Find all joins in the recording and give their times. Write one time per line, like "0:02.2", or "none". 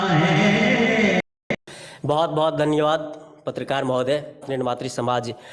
0:01.3
0:04.7